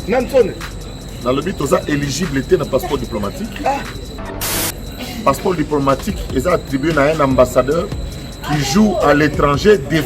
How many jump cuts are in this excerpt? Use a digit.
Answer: 1